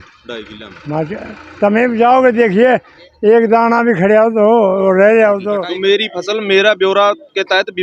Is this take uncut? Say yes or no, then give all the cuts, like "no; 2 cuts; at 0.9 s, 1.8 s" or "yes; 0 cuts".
no; 1 cut; at 5.6 s